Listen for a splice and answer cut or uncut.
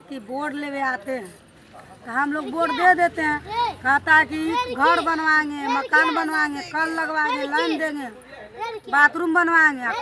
uncut